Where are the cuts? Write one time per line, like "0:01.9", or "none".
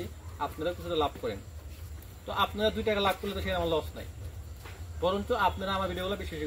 none